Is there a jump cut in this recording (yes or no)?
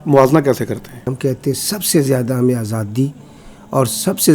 yes